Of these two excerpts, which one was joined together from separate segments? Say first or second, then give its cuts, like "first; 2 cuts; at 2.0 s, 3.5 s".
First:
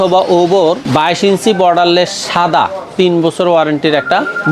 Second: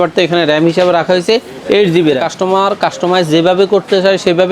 second; 1 cut; at 2.3 s